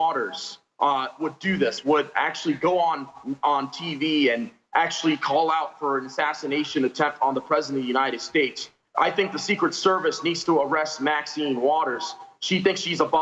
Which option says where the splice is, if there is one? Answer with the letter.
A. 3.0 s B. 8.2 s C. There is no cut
C